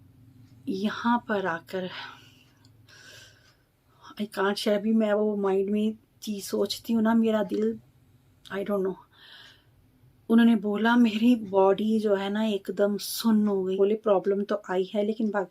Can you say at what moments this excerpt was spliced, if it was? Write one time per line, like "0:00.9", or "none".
0:13.7